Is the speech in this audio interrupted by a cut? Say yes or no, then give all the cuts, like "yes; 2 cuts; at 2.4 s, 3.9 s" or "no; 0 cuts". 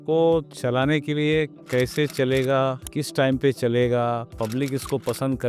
no; 0 cuts